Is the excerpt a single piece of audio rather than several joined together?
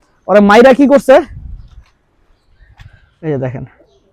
no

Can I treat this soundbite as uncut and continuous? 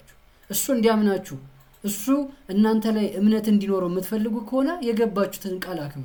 yes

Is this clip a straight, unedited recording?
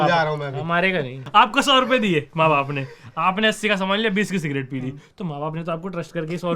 no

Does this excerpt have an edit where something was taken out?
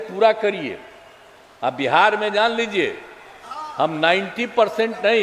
no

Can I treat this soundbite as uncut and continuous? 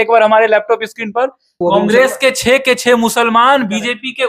no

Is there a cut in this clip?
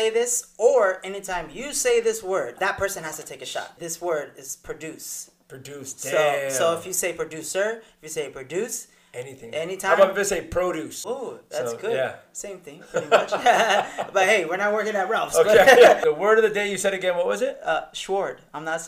yes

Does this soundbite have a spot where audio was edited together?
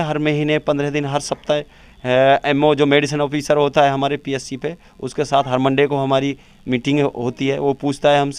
no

